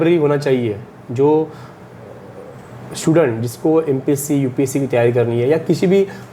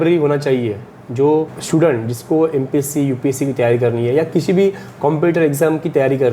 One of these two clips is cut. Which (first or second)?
second